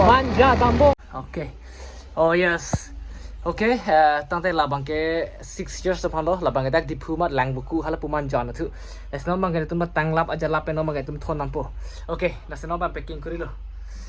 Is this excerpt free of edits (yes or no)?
no